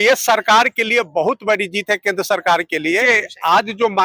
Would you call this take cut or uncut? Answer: cut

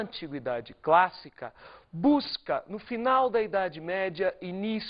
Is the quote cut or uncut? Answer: uncut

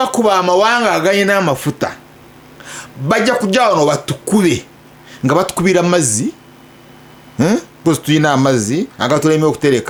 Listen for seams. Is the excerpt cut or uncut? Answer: uncut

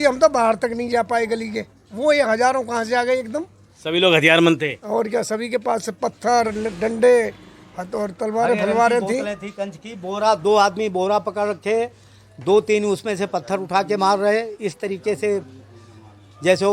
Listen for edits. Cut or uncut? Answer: uncut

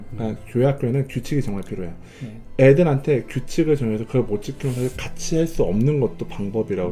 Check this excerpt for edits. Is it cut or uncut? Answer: uncut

